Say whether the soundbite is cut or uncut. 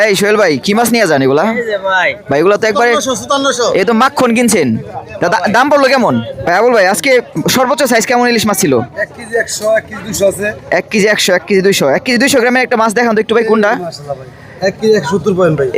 cut